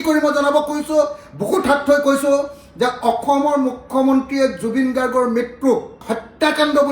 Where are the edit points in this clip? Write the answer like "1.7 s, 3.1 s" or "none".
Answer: 6.0 s